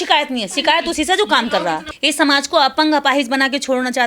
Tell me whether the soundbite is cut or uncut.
cut